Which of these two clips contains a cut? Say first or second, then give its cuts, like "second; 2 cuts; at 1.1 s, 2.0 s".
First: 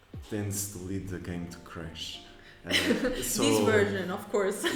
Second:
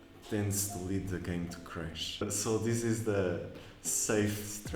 second; 1 cut; at 2.2 s